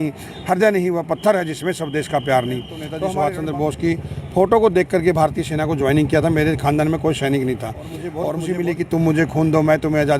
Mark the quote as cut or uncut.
cut